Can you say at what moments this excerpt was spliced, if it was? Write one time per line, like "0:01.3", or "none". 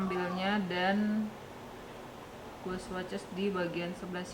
none